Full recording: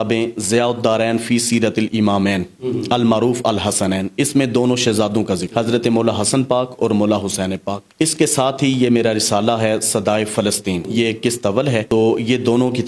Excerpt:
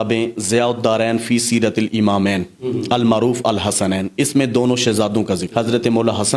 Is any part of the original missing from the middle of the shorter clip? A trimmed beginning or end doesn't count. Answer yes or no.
no